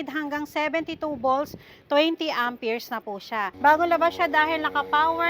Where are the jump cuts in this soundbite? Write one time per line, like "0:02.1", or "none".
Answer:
0:03.5